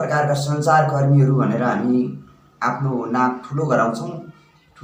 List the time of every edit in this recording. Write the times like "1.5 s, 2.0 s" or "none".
none